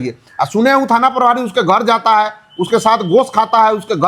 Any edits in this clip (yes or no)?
no